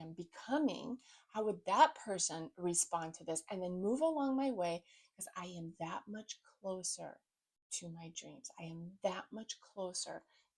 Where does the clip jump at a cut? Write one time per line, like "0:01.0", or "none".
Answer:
none